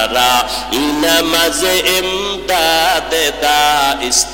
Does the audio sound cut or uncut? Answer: uncut